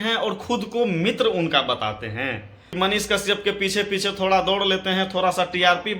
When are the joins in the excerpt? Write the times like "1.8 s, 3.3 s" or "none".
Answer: 2.6 s